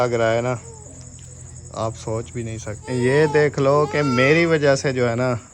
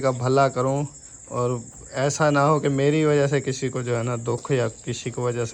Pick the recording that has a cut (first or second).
first